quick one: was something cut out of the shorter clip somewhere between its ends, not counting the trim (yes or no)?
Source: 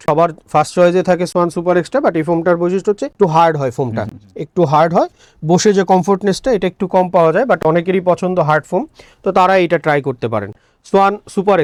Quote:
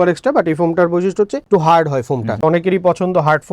yes